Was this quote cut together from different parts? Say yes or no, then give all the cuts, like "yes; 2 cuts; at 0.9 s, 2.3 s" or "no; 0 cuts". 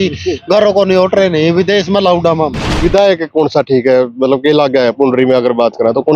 yes; 1 cut; at 2.8 s